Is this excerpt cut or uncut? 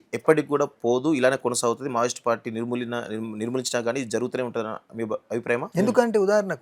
cut